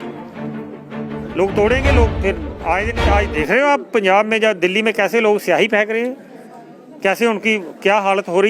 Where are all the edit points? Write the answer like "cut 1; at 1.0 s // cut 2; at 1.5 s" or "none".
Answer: none